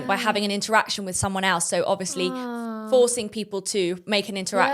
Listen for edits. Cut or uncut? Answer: uncut